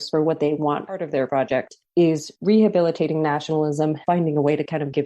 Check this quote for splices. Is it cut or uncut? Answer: cut